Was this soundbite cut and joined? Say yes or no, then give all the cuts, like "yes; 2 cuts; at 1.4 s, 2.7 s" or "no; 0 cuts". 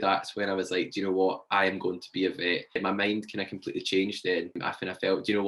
no; 0 cuts